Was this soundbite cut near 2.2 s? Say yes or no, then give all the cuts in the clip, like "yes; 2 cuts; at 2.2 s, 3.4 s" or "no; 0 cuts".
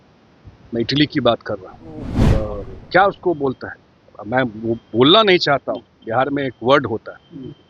yes; 1 cut; at 2.2 s